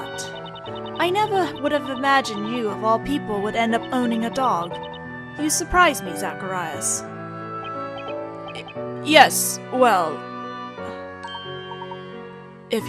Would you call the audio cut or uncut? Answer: cut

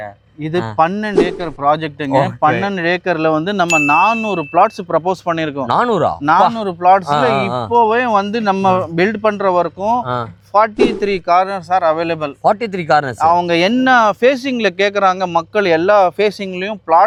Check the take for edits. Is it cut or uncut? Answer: uncut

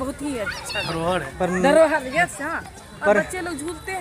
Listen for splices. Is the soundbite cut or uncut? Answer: uncut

